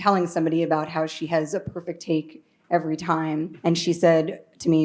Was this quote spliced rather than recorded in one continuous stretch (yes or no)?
yes